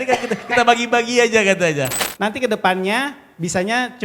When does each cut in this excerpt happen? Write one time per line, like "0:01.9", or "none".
0:02.0